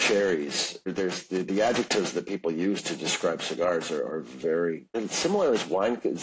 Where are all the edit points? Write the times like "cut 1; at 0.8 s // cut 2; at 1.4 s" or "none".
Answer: cut 1; at 0.9 s // cut 2; at 4.9 s